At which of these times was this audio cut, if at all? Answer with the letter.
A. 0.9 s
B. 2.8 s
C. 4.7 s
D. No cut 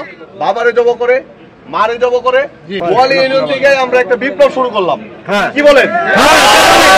B